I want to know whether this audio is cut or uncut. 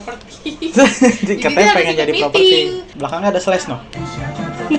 cut